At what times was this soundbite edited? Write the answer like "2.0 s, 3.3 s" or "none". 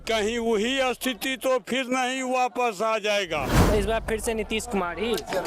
3.6 s

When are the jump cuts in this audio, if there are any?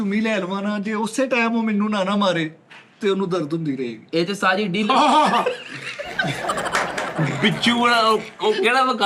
none

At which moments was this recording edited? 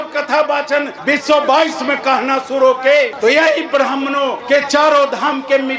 none

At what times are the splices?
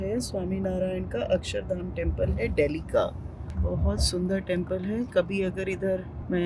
none

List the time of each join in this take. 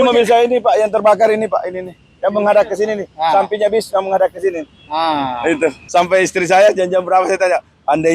5.8 s

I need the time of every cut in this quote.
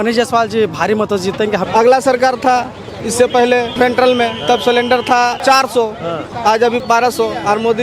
1.6 s, 3.7 s, 5.4 s, 6.8 s

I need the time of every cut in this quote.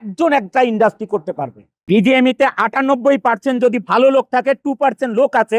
1.7 s

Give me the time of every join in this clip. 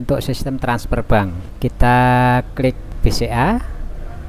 1.4 s, 2.9 s

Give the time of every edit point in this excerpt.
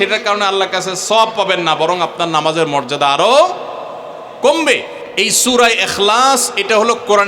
5.0 s

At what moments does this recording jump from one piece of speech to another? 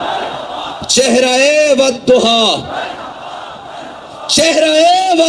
none

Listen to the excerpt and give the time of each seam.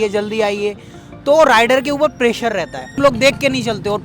3.0 s

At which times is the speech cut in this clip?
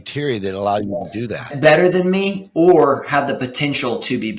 1.5 s

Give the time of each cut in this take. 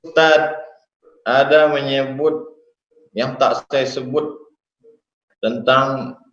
1.1 s

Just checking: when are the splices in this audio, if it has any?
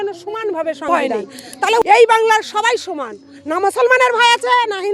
1.8 s

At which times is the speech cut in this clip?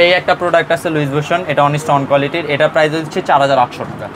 none

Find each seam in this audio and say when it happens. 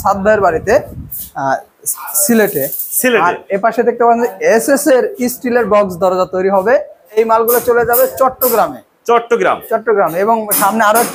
7.2 s

